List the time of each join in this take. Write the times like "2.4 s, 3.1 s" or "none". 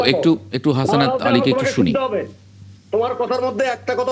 none